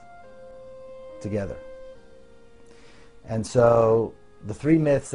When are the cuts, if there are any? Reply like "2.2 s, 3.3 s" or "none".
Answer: none